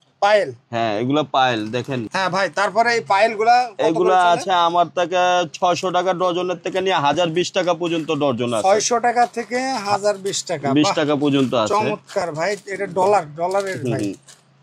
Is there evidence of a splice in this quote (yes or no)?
no